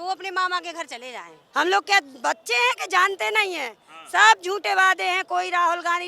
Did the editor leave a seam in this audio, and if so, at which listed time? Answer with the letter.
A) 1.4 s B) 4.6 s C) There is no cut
A